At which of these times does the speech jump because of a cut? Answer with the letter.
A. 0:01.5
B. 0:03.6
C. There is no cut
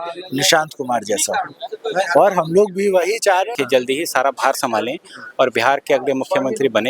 B